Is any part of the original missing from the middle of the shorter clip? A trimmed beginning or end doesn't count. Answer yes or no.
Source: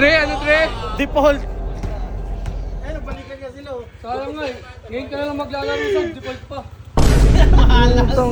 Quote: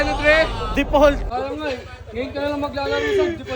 yes